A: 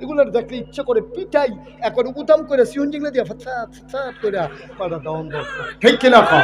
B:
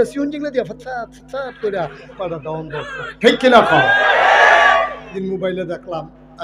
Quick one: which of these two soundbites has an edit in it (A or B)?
B